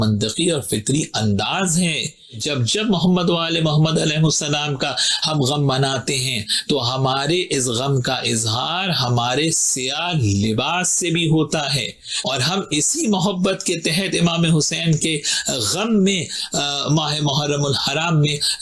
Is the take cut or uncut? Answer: uncut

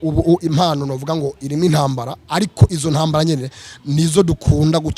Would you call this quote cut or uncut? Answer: uncut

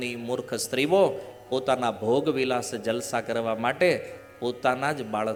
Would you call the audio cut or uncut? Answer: uncut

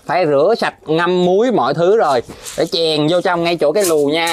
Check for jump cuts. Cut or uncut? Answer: uncut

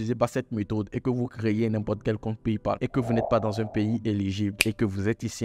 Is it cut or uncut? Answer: uncut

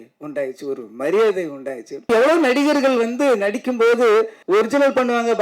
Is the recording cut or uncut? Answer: cut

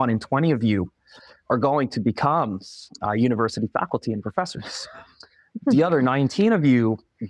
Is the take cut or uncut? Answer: uncut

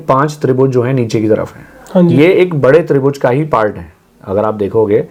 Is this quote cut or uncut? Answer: uncut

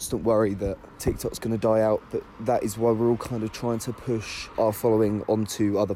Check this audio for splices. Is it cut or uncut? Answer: cut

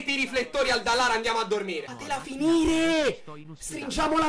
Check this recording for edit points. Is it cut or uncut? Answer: uncut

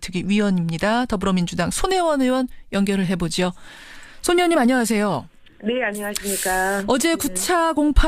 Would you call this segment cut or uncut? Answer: cut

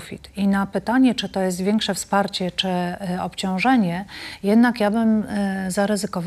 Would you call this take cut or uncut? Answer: uncut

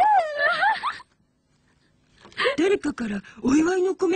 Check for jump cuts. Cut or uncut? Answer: cut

